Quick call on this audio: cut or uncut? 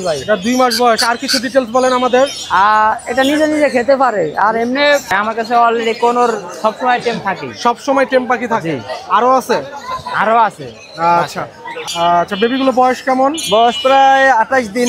cut